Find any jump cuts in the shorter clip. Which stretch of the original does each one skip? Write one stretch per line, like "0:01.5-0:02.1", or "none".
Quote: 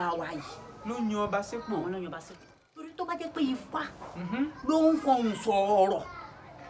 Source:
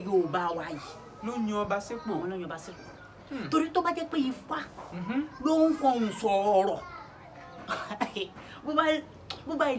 0:03.3-0:03.7